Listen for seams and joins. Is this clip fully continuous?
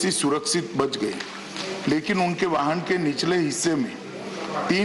yes; 0 cuts

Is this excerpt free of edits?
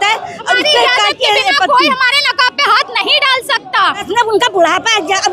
no; 1 cut; at 4.0 s

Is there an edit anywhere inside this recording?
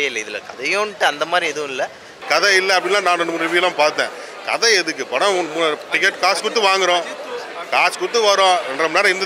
yes; 1 cut; at 2.1 s

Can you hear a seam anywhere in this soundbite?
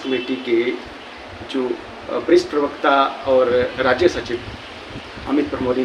no; 0 cuts

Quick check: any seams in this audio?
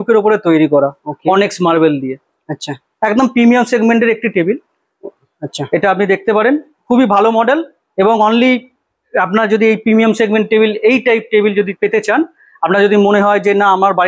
no; 0 cuts

